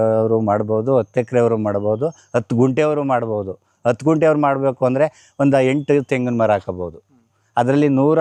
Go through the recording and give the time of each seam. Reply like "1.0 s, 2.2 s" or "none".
none